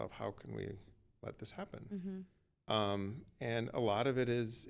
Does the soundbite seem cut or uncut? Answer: uncut